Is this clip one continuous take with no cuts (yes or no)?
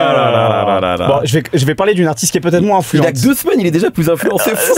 yes